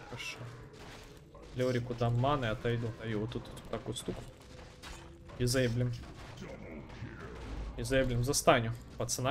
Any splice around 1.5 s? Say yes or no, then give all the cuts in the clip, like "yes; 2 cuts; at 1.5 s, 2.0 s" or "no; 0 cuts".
no; 1 cut; at 3.1 s